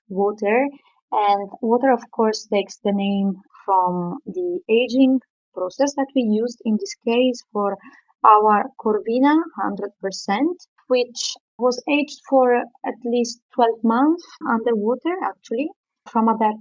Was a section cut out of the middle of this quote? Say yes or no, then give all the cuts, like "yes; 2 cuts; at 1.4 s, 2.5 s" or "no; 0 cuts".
no; 0 cuts